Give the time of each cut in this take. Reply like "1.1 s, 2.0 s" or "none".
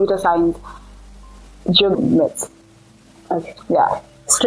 2.0 s